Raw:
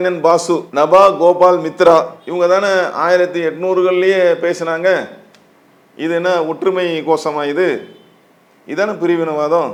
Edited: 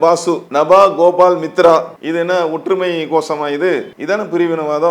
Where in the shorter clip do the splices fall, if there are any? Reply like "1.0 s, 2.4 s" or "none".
2.0 s, 3.9 s